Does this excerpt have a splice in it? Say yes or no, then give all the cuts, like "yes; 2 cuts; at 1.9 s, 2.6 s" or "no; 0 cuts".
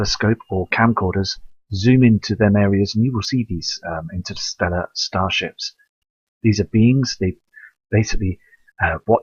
no; 0 cuts